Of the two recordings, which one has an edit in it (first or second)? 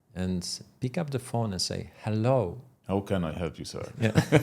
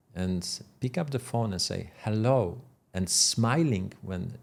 first